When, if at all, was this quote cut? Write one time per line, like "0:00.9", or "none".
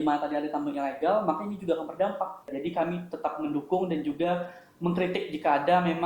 0:02.5